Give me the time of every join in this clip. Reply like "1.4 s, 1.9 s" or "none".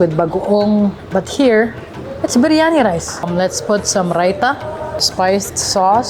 3.3 s, 5.1 s

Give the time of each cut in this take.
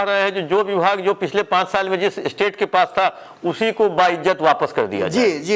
none

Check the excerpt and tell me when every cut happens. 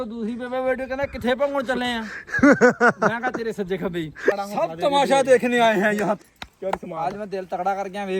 4.3 s, 6.2 s

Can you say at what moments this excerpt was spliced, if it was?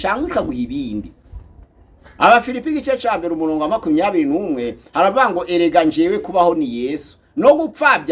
none

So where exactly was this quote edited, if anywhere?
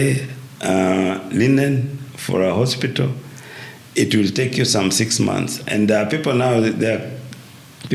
none

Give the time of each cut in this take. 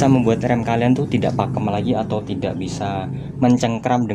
none

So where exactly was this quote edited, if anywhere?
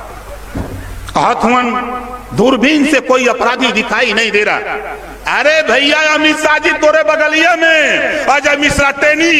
0.9 s

